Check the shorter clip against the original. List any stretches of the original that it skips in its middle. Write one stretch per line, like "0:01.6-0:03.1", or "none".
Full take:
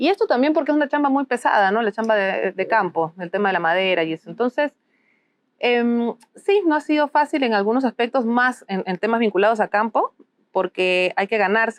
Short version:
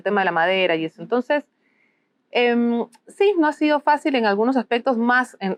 none